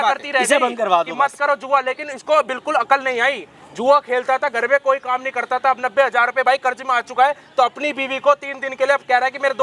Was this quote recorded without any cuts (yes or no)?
yes